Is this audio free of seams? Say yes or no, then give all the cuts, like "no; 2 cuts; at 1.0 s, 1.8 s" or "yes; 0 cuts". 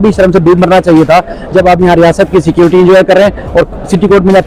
yes; 0 cuts